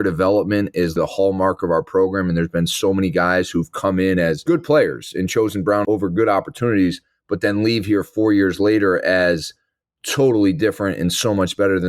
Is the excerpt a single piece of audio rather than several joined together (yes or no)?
no